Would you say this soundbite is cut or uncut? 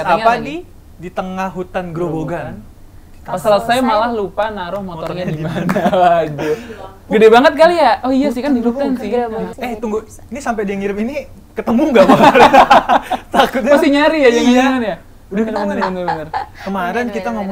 uncut